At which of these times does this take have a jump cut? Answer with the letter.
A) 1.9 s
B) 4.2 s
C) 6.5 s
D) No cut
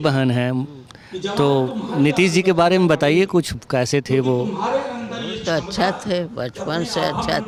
D